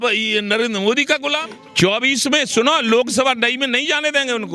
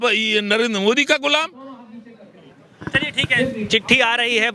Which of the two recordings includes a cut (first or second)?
first